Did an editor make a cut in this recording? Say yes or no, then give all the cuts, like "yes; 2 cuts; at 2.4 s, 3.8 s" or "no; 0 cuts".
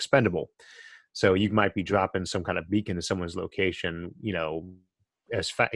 no; 0 cuts